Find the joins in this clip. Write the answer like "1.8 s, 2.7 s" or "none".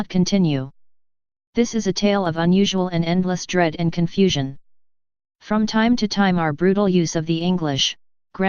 none